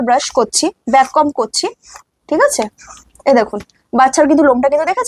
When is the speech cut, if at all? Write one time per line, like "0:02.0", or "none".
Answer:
none